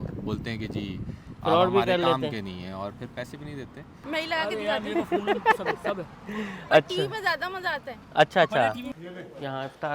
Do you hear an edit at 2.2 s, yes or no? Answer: no